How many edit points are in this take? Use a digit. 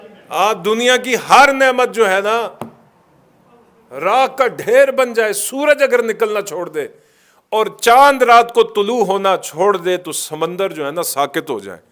0